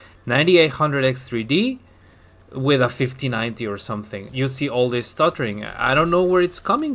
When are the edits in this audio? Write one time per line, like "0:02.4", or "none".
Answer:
0:04.3